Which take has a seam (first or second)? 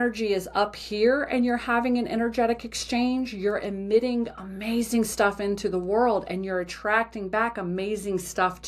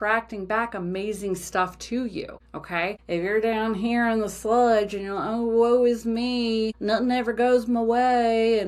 second